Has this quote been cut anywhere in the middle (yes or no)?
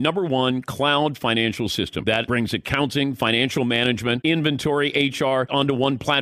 yes